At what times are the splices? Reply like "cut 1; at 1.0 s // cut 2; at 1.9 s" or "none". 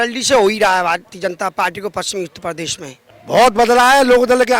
cut 1; at 3.1 s